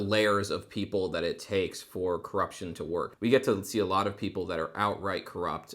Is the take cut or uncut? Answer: cut